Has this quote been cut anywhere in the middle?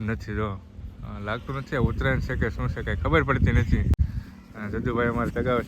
no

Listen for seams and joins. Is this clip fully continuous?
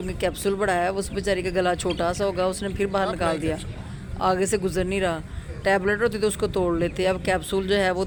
yes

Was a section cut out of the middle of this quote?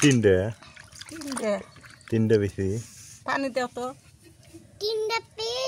no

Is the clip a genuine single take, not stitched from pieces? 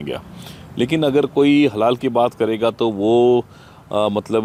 yes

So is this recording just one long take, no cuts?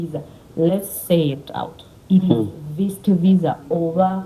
yes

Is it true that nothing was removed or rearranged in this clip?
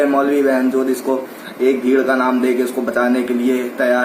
yes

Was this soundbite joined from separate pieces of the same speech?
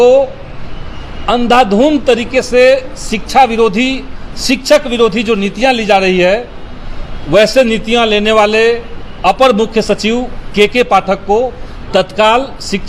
no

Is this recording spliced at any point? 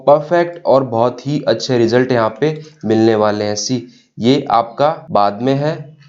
yes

